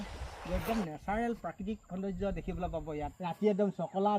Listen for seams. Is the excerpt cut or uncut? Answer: cut